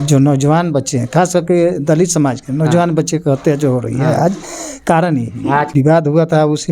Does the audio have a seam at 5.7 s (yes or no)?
yes